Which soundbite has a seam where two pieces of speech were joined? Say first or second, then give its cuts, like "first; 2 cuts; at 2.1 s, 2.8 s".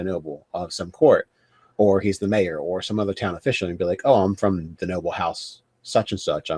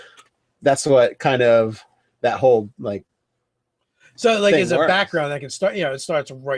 second; 1 cut; at 1.4 s